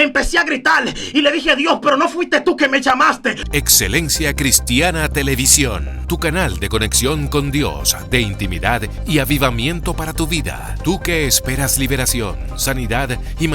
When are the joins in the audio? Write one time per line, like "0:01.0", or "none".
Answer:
0:03.4